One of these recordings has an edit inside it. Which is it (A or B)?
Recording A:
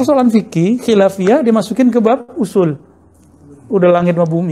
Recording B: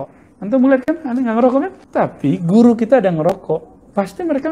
B